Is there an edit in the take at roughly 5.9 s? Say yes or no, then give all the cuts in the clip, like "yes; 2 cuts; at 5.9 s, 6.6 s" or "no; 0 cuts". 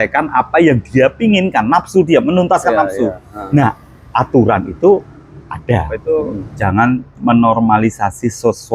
yes; 1 cut; at 5.9 s